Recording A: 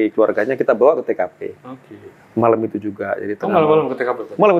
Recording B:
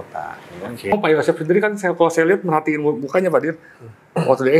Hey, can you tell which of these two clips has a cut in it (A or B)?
B